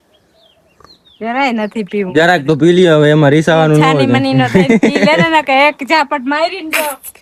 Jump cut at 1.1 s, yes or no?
no